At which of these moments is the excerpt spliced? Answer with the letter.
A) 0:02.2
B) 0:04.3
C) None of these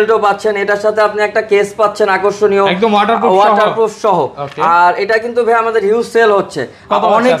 C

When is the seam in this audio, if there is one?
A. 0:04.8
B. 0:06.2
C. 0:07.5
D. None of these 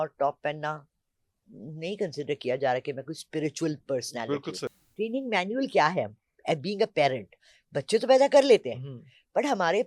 A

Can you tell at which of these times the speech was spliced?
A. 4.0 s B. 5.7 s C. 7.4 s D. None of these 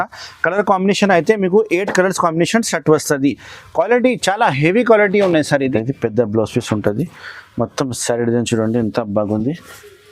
B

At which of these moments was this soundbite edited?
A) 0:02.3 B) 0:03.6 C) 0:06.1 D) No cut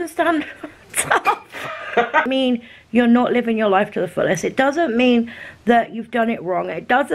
A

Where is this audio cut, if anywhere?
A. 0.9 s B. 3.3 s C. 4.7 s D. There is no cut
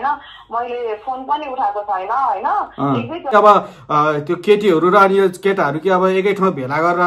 B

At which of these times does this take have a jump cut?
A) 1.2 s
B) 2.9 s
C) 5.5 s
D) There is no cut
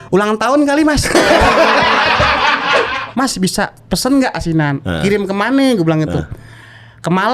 B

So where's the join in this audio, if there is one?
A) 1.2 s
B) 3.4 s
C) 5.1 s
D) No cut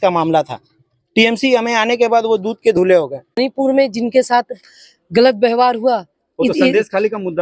B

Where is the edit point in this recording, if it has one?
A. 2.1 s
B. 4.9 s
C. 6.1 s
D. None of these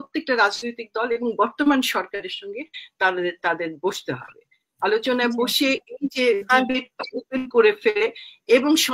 D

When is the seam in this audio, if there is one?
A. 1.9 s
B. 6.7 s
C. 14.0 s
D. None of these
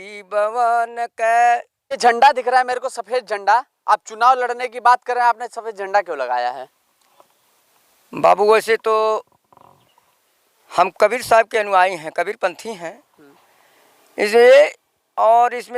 A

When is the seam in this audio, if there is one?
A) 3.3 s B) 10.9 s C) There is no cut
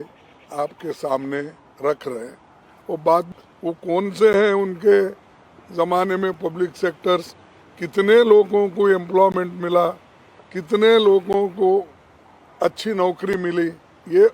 A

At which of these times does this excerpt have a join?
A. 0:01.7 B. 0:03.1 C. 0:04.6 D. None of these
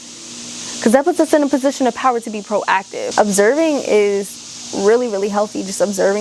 B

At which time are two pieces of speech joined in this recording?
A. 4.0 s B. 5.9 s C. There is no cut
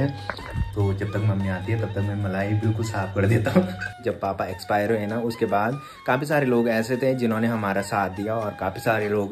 A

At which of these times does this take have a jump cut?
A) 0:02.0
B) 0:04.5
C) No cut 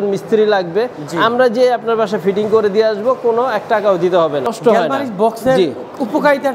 B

